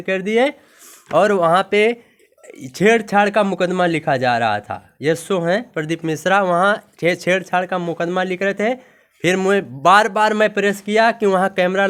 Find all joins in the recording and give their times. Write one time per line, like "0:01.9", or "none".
none